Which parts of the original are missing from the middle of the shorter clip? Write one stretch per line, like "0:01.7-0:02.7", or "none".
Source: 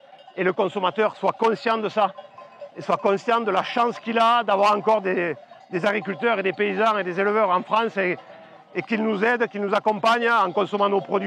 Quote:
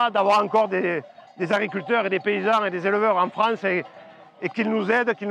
none